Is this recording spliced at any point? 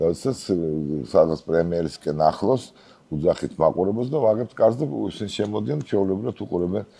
no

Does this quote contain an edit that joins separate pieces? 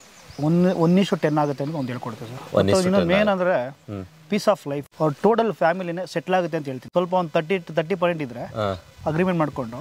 yes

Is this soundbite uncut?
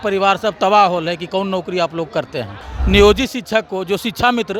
no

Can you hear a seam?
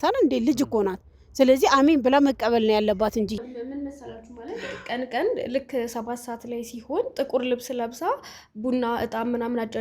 yes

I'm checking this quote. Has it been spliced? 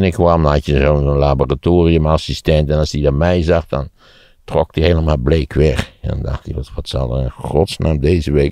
no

